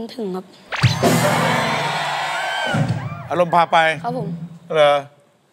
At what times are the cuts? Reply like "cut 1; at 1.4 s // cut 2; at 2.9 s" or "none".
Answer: none